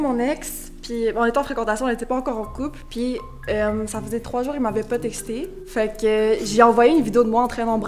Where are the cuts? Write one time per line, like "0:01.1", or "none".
none